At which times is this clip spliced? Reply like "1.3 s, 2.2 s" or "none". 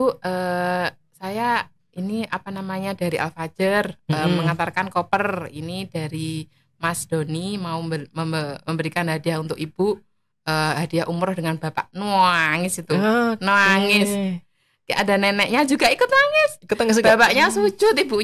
none